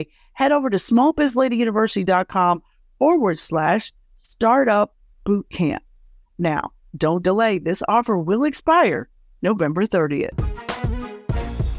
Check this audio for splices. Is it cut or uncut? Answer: cut